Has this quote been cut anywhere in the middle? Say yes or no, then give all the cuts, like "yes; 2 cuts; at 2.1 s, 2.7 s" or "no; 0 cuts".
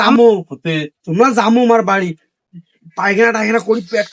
no; 0 cuts